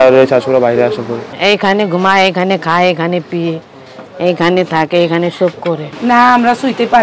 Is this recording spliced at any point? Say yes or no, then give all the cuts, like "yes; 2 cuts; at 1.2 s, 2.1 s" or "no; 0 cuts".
yes; 2 cuts; at 1.2 s, 5.9 s